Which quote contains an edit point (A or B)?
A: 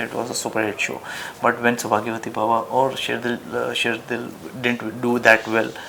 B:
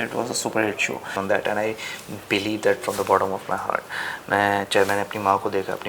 B